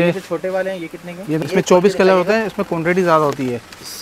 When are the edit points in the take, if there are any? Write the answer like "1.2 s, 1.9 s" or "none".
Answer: 1.4 s